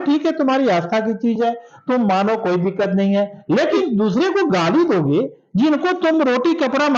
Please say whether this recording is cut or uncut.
cut